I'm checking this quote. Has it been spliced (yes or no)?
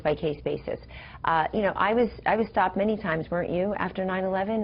no